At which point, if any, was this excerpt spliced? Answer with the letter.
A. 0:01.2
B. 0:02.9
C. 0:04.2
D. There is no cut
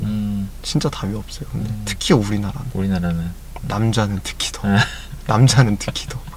D